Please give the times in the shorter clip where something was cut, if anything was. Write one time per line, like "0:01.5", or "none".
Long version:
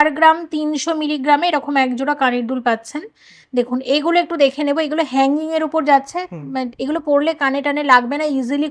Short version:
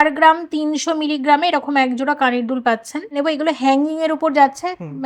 0:03.1